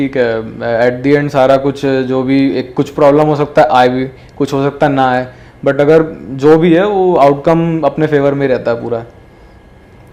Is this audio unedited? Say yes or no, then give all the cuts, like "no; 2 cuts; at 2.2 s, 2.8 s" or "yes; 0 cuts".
yes; 0 cuts